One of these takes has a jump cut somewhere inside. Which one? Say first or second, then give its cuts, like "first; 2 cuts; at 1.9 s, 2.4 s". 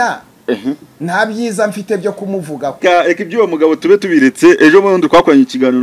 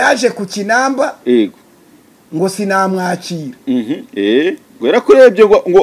first; 1 cut; at 2.8 s